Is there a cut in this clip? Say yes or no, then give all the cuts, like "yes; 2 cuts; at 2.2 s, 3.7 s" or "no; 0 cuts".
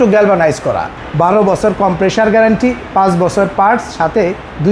yes; 1 cut; at 0.9 s